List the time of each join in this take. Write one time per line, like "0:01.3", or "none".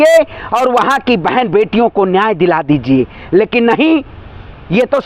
none